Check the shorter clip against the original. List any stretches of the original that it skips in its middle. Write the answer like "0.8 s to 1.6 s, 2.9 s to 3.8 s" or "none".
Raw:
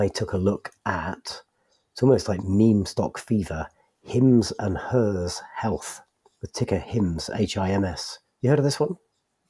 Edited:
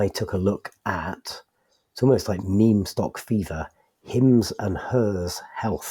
none